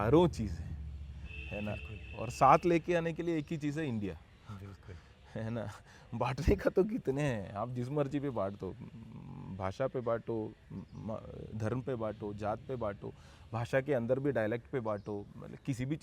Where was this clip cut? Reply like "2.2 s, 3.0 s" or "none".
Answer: none